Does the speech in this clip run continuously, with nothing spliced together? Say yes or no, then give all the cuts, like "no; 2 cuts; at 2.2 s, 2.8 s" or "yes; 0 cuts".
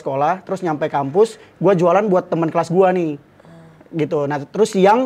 yes; 0 cuts